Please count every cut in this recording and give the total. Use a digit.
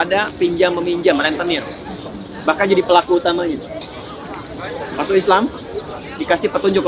0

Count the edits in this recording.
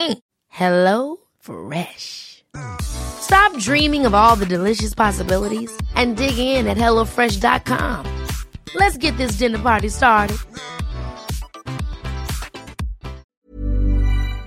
1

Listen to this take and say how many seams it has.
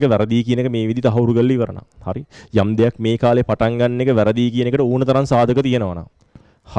0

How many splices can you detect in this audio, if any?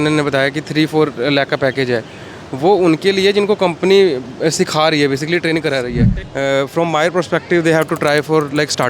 1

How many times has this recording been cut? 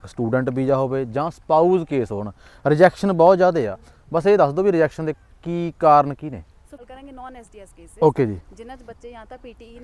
1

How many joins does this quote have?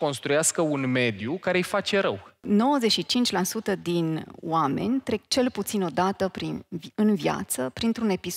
1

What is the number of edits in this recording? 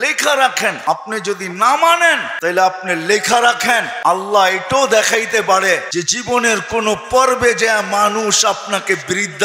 4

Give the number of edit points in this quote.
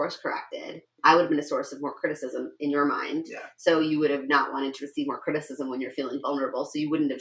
1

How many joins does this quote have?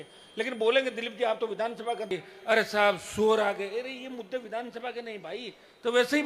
1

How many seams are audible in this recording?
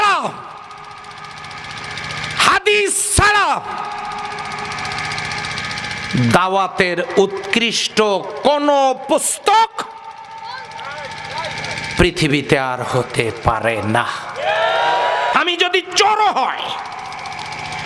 1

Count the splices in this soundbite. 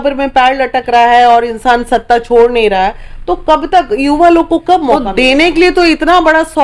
1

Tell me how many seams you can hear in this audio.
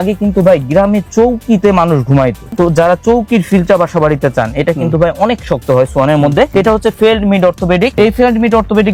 0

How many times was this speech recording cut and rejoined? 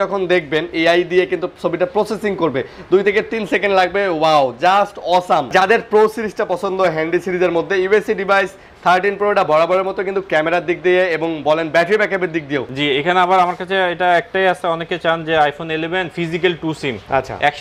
2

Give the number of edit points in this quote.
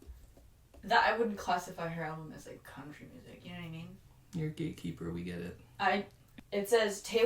1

